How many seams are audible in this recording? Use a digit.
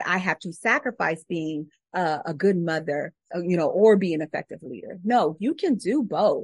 2